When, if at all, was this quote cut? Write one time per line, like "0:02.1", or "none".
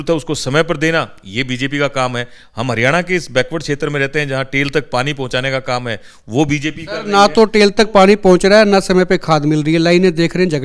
none